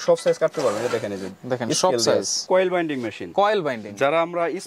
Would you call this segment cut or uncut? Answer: cut